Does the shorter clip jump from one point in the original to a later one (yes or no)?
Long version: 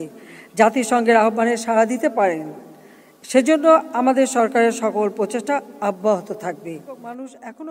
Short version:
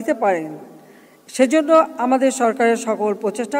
no